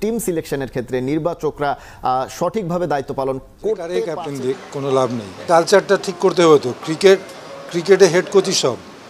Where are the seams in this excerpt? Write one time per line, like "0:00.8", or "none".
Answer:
0:04.4